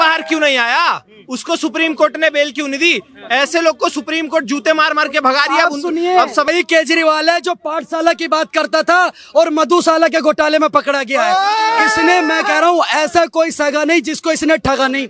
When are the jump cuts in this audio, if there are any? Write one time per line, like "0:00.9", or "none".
0:06.5